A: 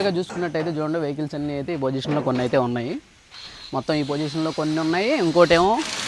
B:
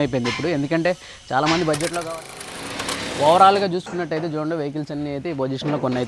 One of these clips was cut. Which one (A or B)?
B